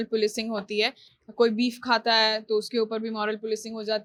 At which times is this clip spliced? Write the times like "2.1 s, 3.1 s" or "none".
none